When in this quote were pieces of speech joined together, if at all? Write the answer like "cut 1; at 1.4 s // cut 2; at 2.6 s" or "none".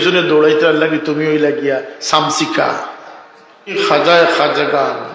cut 1; at 3.7 s